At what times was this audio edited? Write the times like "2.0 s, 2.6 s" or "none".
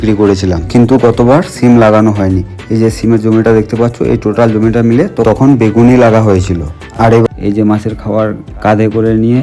7.3 s